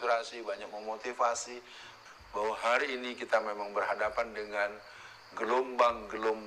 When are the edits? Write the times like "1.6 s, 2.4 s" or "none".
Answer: 1.9 s